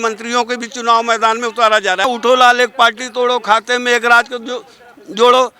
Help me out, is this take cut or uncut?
cut